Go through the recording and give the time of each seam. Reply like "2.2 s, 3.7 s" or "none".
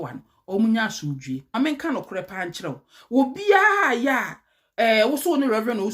1.5 s